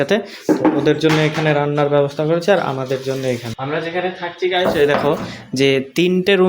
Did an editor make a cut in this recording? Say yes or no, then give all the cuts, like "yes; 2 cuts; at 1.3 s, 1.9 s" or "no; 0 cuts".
yes; 1 cut; at 3.5 s